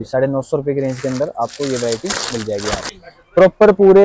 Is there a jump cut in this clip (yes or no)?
yes